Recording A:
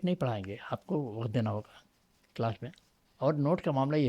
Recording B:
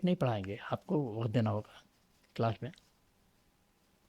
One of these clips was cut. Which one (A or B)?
A